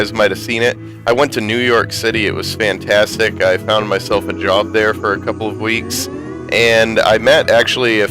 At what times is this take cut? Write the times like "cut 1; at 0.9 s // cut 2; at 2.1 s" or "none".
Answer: cut 1; at 3.8 s